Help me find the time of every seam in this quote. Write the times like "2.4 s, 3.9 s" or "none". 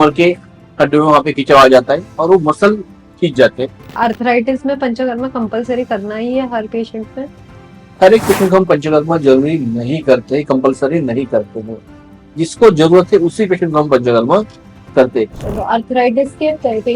3.9 s, 7.8 s, 15.4 s